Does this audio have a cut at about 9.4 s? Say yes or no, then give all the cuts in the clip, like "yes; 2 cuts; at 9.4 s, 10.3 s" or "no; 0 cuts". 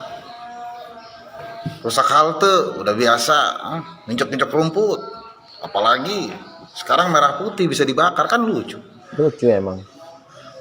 no; 0 cuts